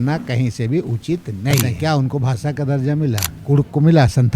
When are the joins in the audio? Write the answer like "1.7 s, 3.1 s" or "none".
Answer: 1.7 s, 3.3 s